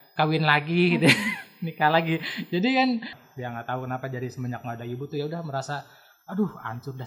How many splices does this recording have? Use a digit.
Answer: 1